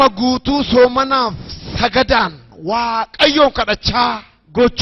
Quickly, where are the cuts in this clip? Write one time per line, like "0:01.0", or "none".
0:01.0